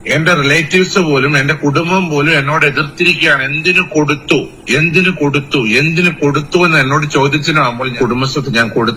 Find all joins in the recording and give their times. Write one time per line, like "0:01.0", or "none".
0:07.9